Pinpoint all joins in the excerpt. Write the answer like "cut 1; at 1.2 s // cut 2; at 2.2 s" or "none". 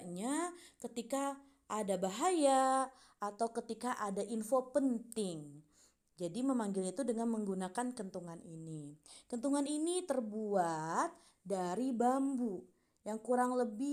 none